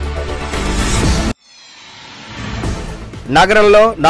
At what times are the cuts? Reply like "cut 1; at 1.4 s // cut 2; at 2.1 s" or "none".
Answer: cut 1; at 1.2 s